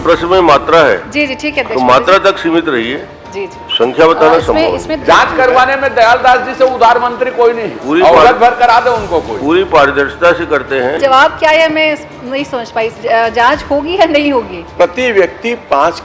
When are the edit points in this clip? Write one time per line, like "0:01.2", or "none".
0:05.0
0:11.0
0:14.6